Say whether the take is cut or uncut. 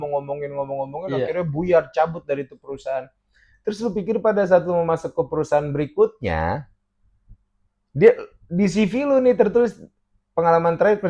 uncut